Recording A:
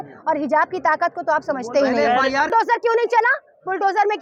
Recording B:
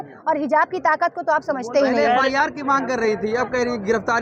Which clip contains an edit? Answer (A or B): A